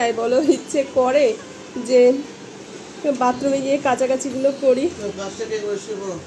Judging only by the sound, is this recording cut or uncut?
uncut